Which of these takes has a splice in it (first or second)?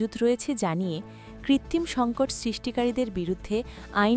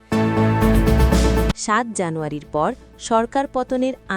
second